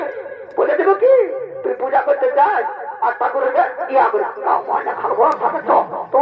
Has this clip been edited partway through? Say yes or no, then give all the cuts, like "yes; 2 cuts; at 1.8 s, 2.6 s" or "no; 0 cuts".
no; 0 cuts